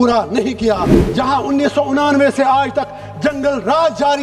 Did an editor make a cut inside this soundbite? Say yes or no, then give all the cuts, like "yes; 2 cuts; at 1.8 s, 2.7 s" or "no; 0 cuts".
yes; 1 cut; at 1.0 s